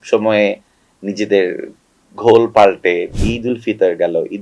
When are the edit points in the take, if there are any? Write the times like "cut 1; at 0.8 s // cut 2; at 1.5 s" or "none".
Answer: cut 1; at 3.1 s